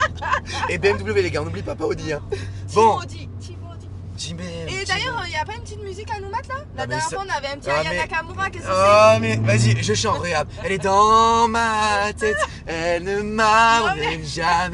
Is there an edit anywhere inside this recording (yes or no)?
no